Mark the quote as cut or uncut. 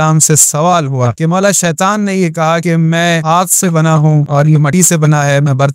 cut